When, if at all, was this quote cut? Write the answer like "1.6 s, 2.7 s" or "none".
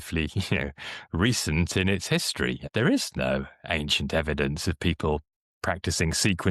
2.6 s